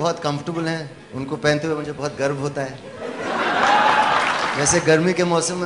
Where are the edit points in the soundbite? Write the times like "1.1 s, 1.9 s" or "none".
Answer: 4.6 s